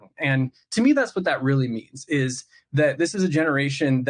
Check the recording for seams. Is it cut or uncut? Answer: uncut